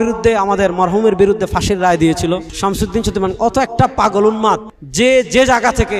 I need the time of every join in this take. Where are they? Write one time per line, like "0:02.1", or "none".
0:02.5
0:04.8

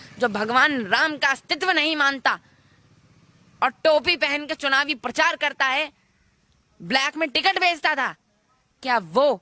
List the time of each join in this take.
none

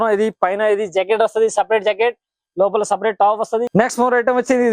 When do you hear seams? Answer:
0:03.7

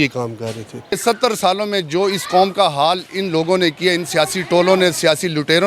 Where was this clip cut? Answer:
0:01.0

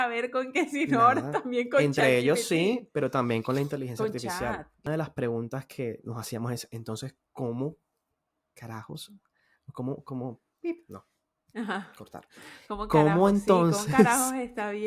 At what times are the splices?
0:04.9

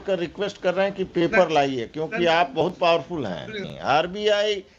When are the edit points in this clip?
0:03.7

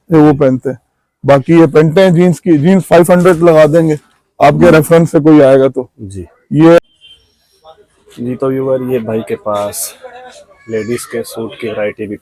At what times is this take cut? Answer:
0:06.8

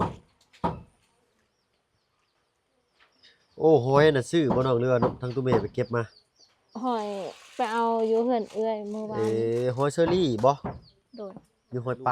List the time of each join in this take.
none

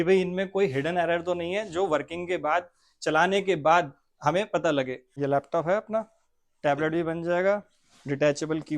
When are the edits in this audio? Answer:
0:05.0

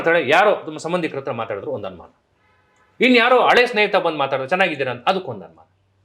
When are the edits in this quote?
none

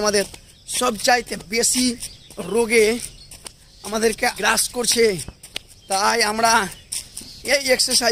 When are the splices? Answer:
0:04.4

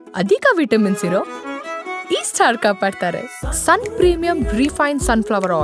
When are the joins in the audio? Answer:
none

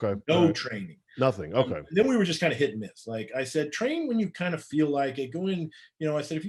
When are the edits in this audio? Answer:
none

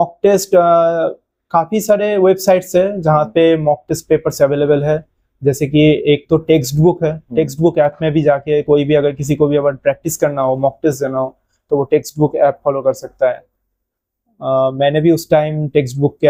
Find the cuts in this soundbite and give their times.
none

